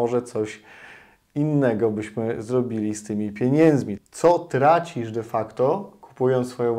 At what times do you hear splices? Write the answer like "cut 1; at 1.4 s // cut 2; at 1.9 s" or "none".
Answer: cut 1; at 3.9 s